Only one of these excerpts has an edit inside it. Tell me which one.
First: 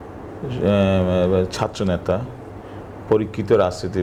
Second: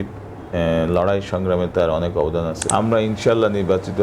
second; 1 cut; at 2.6 s

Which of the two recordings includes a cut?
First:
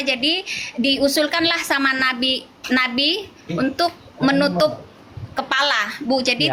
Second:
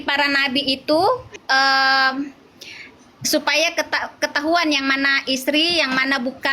second; 1 cut; at 1.4 s

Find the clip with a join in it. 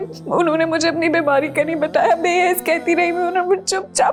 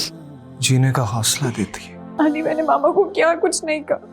second; 1 cut; at 2.0 s

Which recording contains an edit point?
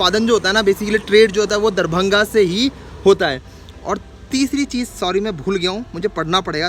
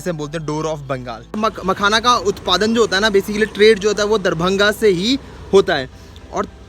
second; 1 cut; at 1.4 s

